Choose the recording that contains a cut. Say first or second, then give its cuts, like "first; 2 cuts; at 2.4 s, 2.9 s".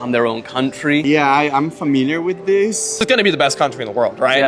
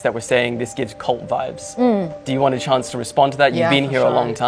first; 1 cut; at 3.0 s